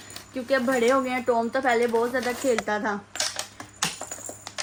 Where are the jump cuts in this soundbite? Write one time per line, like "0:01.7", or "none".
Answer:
none